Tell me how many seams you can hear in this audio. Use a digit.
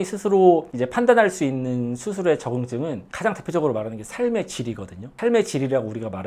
1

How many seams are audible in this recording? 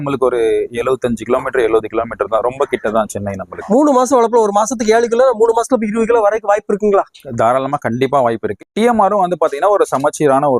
2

